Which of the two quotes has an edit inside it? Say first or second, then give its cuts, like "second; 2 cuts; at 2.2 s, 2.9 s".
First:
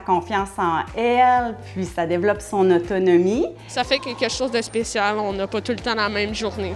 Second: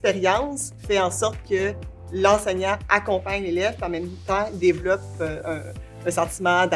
first; 1 cut; at 3.8 s